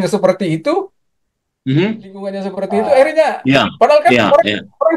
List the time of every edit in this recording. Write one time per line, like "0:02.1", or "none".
0:02.5

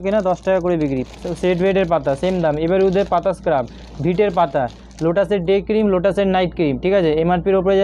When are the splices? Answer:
none

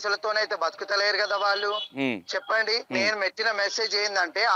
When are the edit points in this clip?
0:01.9
0:02.9

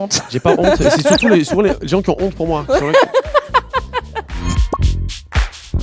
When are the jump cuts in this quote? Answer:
0:04.3

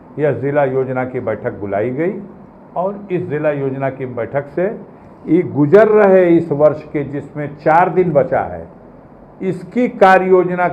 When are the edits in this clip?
none

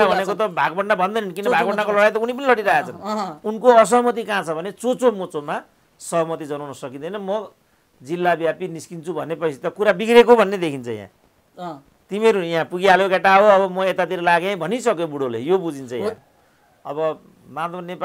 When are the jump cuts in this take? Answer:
0:16.2

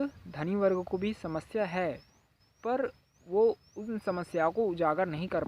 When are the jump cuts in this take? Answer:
none

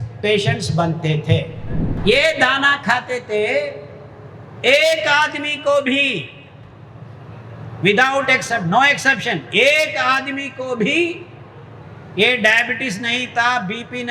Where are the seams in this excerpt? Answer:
0:01.8

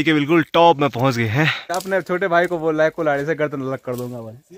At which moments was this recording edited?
0:01.8

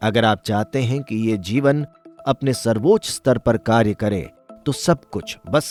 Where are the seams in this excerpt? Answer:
none

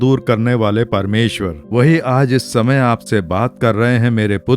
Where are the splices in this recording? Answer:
0:01.5

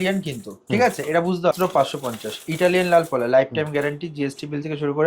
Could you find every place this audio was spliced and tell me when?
0:01.5

